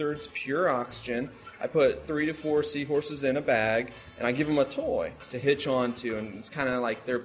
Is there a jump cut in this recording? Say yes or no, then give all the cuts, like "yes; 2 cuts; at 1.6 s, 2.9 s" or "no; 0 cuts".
yes; 2 cuts; at 2.0 s, 5.2 s